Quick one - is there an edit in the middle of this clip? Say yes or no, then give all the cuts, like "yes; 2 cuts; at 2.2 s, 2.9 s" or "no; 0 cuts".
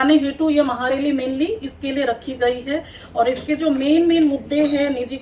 no; 0 cuts